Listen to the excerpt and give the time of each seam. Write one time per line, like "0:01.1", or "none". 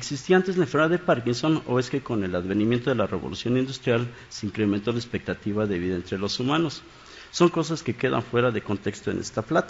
0:04.2